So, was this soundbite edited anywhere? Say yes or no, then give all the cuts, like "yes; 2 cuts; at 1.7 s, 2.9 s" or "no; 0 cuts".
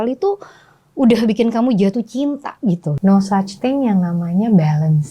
yes; 1 cut; at 2.9 s